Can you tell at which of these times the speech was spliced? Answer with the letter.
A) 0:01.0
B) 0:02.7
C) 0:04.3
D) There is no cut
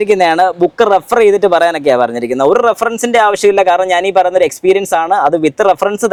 D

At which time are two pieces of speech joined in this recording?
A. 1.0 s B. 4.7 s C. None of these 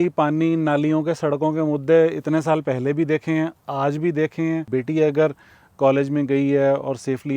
B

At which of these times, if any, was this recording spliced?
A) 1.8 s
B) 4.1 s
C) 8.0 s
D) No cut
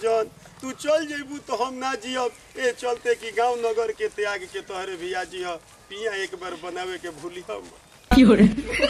C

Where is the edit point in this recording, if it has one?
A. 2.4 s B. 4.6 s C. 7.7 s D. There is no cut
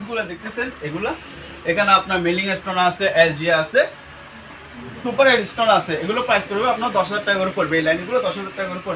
D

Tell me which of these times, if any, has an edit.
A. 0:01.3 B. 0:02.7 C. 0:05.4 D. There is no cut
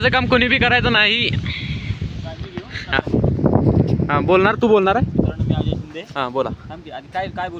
D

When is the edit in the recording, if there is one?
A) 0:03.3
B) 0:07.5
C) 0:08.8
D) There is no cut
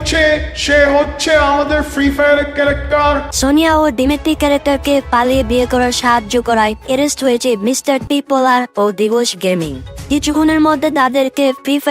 A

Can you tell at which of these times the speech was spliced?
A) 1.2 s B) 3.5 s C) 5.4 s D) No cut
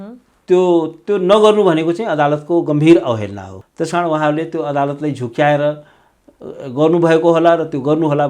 B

